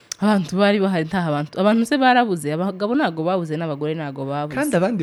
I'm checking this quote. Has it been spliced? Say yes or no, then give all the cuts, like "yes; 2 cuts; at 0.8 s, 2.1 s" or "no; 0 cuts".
no; 0 cuts